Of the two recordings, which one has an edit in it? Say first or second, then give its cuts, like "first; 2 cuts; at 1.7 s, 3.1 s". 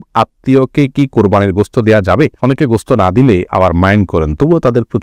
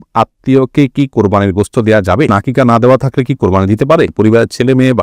second; 2 cuts; at 2.3 s, 4.1 s